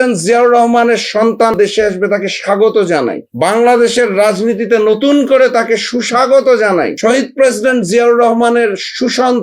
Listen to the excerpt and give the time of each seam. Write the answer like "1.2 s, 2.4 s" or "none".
1.6 s, 3.2 s, 6.9 s